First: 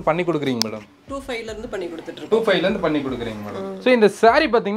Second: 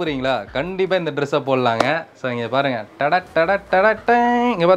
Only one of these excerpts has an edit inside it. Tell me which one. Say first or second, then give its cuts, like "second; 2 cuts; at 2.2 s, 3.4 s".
first; 1 cut; at 3.7 s